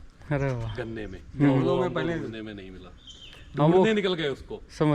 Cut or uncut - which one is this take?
uncut